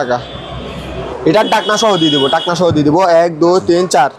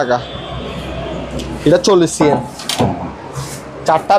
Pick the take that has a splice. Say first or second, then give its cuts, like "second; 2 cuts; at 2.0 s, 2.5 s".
first; 1 cut; at 1.0 s